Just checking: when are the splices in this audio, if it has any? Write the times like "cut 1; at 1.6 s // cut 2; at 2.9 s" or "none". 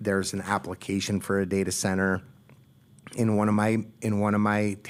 none